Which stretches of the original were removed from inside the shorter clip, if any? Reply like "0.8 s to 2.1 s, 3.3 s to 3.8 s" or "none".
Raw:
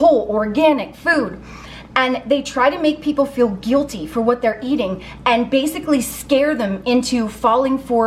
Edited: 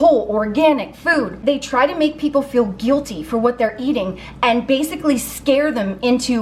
1.4 s to 2.2 s